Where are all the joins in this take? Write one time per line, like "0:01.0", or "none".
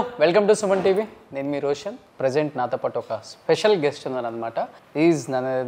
0:02.0
0:04.8